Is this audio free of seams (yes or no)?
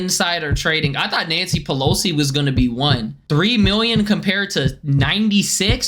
yes